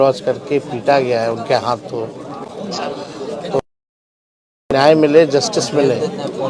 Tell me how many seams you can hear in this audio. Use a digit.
0